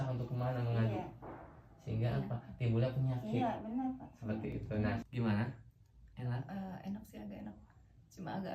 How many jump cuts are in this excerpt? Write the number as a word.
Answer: one